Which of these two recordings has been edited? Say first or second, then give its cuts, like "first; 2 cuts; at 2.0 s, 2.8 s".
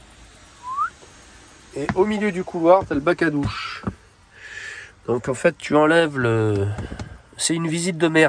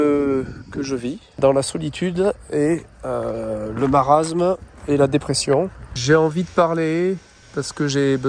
second; 3 cuts; at 1.2 s, 5.9 s, 7.4 s